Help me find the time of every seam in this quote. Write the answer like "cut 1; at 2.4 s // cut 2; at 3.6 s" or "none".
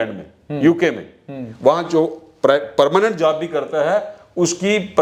none